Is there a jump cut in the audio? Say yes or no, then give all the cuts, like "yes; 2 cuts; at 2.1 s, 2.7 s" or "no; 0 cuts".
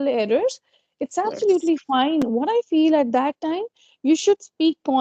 no; 0 cuts